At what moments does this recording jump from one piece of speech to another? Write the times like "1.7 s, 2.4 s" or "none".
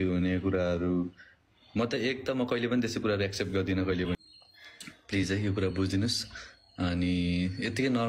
4.1 s